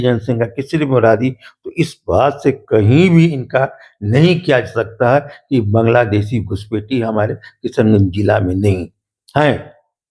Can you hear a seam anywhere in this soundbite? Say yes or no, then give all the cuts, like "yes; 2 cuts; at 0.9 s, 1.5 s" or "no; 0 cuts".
no; 0 cuts